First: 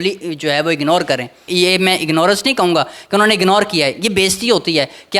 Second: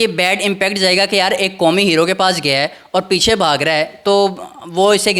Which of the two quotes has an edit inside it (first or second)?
first